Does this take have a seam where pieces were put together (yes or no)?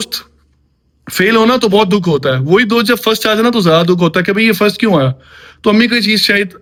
no